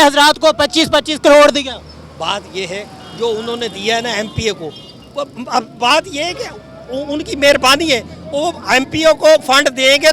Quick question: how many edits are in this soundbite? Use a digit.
0